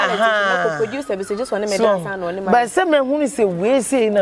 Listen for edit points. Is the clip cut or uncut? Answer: uncut